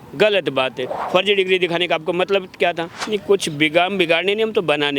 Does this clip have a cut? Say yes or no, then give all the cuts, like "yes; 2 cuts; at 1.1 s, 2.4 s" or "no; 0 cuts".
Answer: yes; 2 cuts; at 0.9 s, 3.0 s